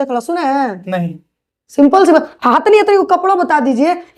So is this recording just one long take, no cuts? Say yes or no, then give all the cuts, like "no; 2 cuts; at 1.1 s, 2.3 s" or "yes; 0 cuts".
yes; 0 cuts